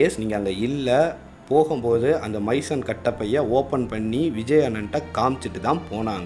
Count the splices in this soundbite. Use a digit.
0